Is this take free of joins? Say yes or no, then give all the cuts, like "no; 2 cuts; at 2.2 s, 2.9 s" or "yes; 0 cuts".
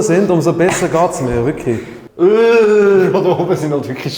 no; 1 cut; at 2.0 s